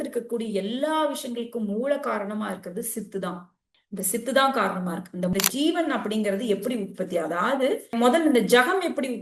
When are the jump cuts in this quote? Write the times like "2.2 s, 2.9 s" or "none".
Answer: 5.3 s, 7.9 s